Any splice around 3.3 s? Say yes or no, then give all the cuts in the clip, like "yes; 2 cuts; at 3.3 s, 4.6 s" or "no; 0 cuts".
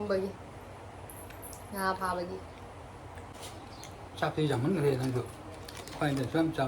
yes; 1 cut; at 3.3 s